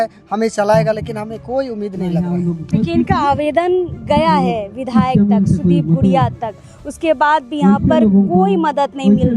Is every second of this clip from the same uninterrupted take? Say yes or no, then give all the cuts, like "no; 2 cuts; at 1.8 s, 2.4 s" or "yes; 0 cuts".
yes; 0 cuts